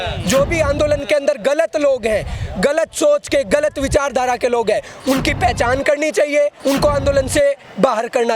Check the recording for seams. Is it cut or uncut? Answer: cut